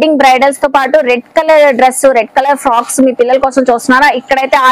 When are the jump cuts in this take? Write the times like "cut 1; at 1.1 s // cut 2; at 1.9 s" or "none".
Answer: none

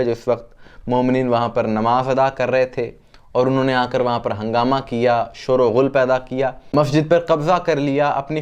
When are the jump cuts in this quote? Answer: none

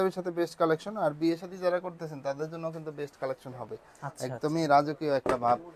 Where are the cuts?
none

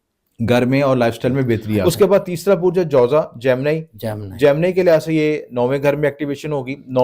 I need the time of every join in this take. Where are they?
cut 1; at 1.8 s

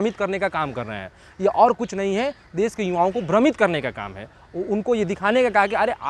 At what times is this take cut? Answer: none

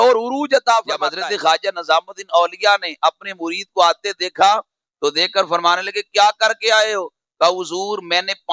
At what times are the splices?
cut 1; at 1.1 s

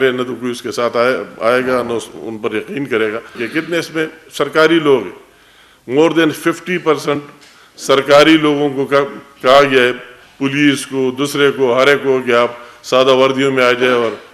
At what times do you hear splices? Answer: cut 1; at 3.4 s

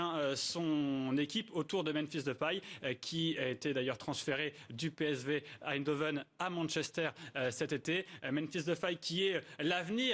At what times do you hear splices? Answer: cut 1; at 7.8 s

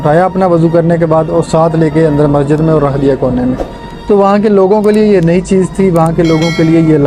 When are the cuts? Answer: none

